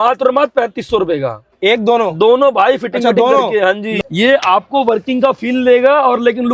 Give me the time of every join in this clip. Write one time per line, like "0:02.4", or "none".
0:03.9

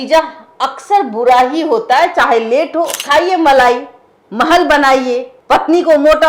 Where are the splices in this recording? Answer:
0:03.0
0:05.3

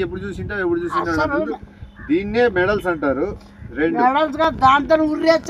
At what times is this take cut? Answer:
none

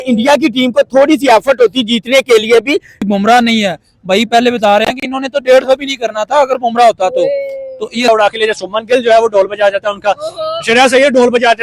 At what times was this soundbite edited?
0:03.0
0:08.1

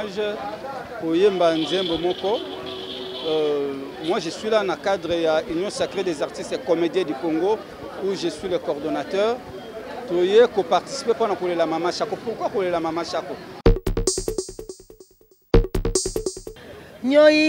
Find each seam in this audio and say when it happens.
0:13.4
0:16.5

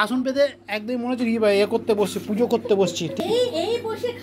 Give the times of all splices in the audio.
0:03.2

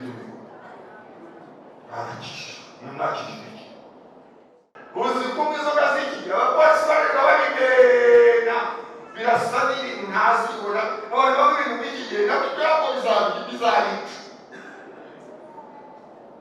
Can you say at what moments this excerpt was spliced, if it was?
0:04.6

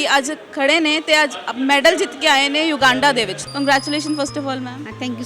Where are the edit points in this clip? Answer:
0:03.4

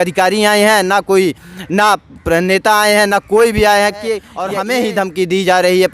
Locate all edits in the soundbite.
0:04.8

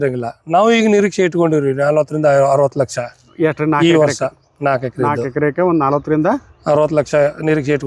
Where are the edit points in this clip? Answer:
none

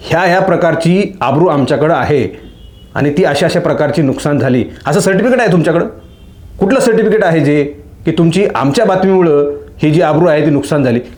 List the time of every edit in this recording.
none

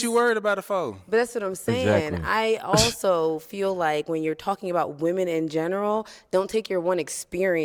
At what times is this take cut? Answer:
none

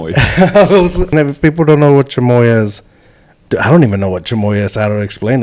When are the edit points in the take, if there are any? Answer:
0:01.1

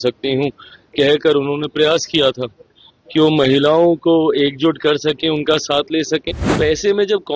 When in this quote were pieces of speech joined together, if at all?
0:06.4

